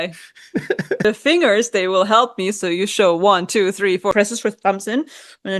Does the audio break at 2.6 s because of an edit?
no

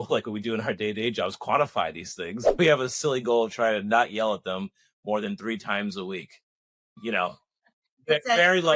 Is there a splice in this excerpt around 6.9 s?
yes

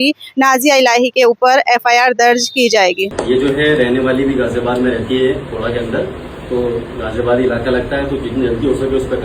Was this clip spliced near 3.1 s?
yes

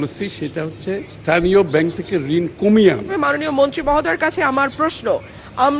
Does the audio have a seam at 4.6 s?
no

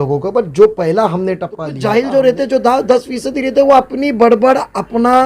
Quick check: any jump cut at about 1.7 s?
yes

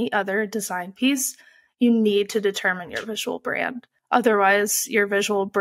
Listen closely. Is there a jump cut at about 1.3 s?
no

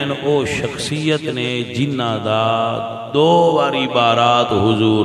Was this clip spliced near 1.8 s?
no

